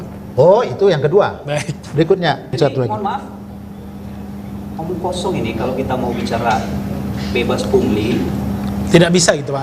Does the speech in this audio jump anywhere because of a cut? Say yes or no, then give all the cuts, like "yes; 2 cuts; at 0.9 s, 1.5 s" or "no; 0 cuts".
yes; 1 cut; at 2.5 s